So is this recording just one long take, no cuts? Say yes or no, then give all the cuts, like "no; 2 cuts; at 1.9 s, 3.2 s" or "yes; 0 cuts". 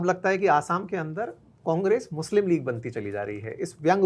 yes; 0 cuts